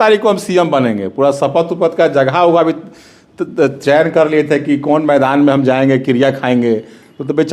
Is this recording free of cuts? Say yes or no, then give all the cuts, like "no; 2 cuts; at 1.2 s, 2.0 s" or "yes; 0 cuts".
yes; 0 cuts